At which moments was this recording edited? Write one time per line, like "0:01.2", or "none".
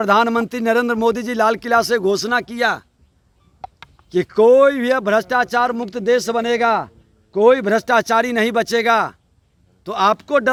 none